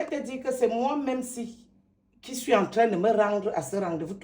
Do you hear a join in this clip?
no; 0 cuts

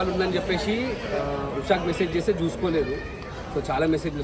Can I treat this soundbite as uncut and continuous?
yes; 0 cuts

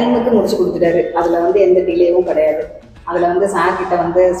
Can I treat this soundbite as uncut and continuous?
yes; 0 cuts

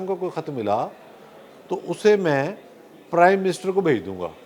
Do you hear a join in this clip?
no; 0 cuts

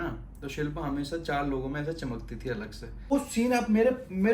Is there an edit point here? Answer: yes; 1 cut; at 3.1 s

